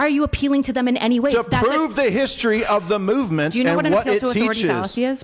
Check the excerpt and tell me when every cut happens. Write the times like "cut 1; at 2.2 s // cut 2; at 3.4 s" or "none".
none